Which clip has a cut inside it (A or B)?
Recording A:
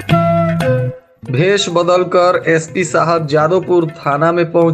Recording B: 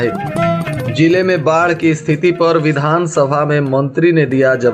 A